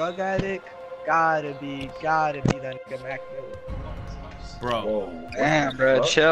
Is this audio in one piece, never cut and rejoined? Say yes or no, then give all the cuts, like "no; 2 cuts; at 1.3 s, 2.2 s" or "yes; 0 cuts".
yes; 0 cuts